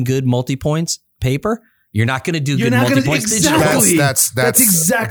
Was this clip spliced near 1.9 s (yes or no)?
no